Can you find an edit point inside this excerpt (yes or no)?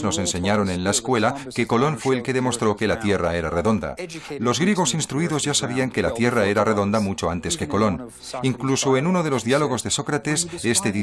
yes